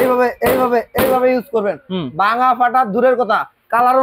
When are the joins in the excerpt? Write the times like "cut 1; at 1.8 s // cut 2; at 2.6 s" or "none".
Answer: none